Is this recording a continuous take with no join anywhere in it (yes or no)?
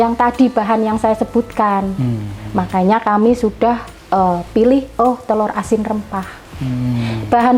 yes